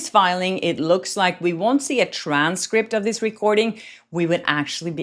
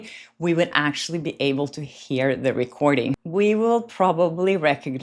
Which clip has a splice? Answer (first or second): second